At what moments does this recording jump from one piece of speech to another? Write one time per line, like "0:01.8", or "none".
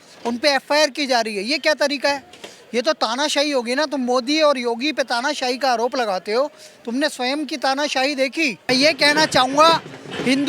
0:08.7